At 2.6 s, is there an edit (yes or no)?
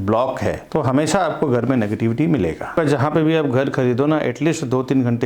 yes